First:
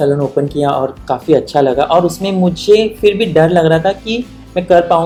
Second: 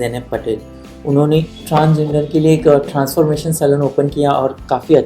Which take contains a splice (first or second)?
second